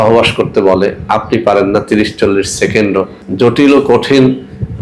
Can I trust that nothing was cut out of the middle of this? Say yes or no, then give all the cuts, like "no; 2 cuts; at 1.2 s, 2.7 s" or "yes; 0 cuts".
no; 1 cut; at 3.2 s